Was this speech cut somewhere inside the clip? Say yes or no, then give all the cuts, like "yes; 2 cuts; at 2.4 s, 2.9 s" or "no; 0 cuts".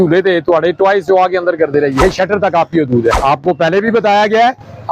yes; 2 cuts; at 2.0 s, 3.2 s